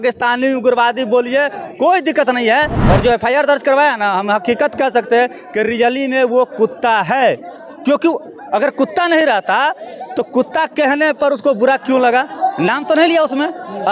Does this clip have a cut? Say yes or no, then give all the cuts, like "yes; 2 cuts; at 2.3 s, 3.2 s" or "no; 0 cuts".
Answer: yes; 1 cut; at 2.7 s